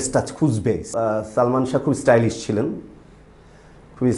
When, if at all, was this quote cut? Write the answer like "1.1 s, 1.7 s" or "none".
1.0 s